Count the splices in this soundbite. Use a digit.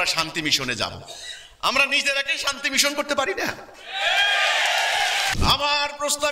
1